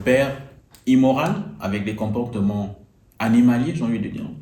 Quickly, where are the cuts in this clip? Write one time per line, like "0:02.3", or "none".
none